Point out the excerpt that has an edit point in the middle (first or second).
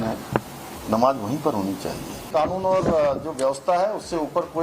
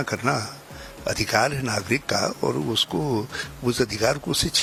first